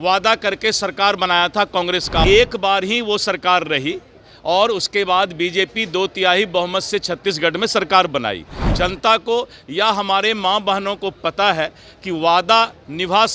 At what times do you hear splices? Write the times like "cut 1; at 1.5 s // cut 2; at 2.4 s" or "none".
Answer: cut 1; at 2.2 s // cut 2; at 8.6 s